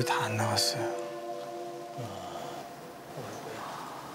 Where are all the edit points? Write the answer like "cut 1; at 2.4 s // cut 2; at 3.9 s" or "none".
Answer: none